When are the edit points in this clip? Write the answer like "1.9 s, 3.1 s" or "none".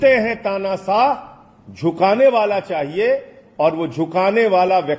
none